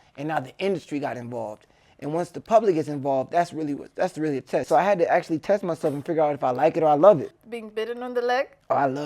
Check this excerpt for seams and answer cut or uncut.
cut